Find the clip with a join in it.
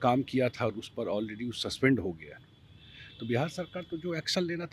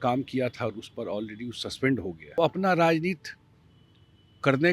second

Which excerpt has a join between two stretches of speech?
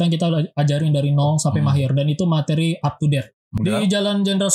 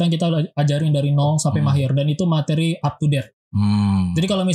first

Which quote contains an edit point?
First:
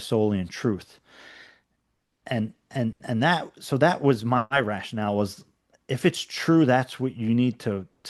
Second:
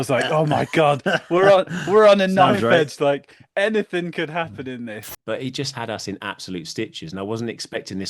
second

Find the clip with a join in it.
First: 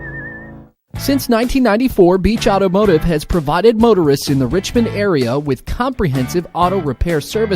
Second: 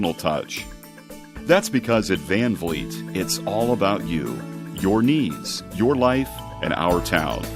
first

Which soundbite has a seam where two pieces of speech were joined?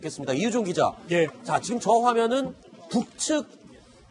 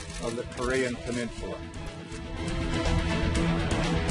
first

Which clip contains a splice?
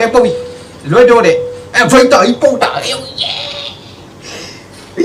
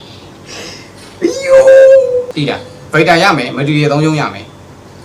second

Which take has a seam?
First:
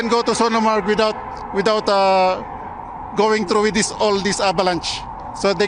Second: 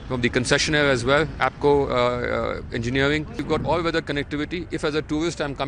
second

